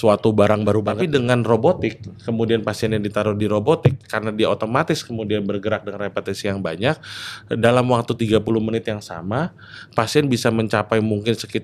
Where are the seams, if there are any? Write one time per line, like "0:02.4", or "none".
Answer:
0:00.9